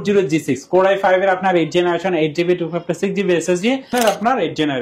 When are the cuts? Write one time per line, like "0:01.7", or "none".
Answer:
0:03.9

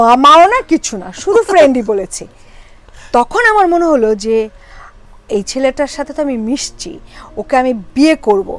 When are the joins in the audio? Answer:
none

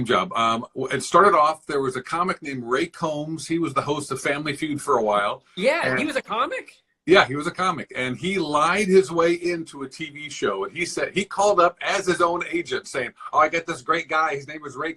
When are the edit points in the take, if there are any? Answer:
none

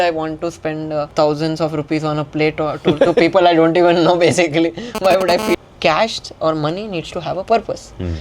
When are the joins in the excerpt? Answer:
0:01.1
0:05.6

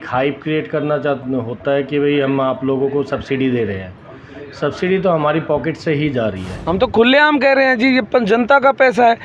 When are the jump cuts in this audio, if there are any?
0:06.5

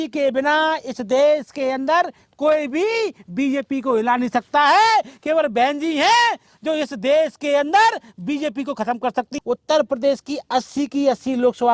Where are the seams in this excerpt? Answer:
0:09.3

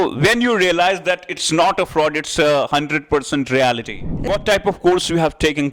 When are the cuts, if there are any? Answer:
0:04.2

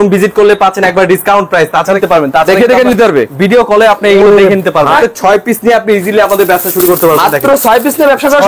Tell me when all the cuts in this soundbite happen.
0:02.0
0:04.9

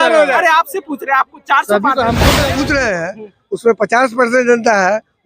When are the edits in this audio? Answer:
0:02.4

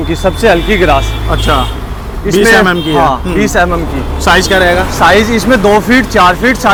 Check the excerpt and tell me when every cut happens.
none

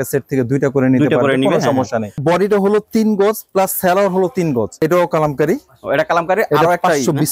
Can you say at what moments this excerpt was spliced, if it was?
0:02.2
0:04.8

